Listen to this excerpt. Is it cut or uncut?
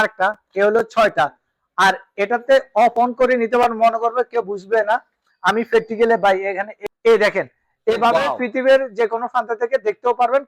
cut